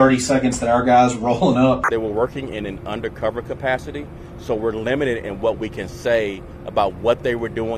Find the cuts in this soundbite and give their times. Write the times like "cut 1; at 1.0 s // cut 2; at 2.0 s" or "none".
cut 1; at 1.8 s